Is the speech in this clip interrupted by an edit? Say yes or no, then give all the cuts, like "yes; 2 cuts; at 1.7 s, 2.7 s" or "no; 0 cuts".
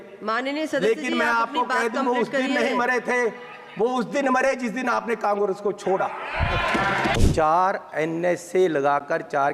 yes; 1 cut; at 7.1 s